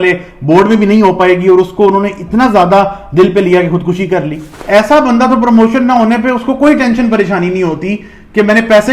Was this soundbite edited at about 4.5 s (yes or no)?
yes